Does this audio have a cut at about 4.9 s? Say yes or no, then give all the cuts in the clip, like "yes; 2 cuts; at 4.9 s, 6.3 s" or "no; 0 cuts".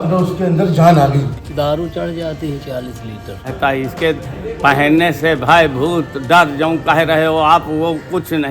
no; 2 cuts; at 1.4 s, 3.4 s